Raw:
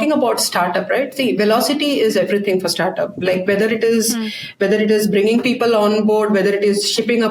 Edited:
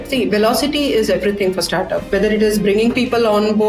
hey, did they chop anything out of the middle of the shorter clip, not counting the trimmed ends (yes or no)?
yes